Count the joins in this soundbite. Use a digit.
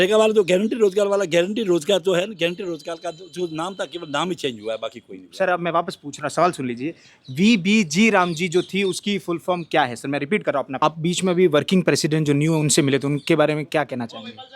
1